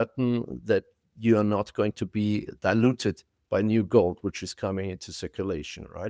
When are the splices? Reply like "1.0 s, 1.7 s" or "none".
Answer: none